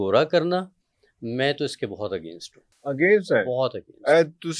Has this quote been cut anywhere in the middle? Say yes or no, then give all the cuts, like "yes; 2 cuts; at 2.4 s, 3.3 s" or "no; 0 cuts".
no; 0 cuts